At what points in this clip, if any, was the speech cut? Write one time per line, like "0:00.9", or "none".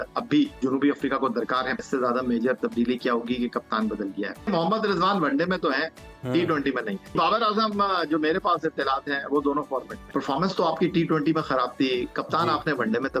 0:01.8
0:04.5
0:07.1
0:10.0